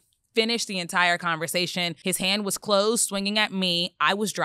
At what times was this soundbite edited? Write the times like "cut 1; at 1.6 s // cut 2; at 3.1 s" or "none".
cut 1; at 1.9 s